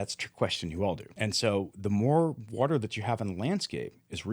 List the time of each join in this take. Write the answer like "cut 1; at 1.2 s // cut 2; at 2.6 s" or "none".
cut 1; at 1.1 s